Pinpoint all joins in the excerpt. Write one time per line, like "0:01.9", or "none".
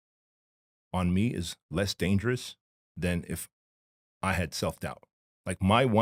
none